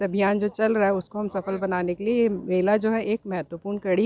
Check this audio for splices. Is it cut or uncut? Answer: uncut